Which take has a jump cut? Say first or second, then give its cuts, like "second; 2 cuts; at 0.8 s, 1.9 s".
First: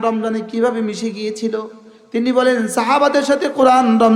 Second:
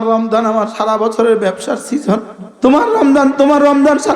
second; 1 cut; at 2.4 s